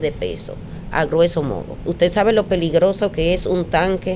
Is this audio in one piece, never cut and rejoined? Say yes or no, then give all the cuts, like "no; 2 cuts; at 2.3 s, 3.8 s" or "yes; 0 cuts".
no; 1 cut; at 1.8 s